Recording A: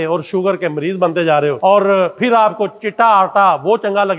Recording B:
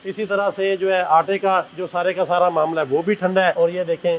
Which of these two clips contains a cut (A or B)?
A